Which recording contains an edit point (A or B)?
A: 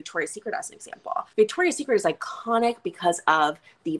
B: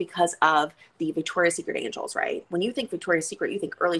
A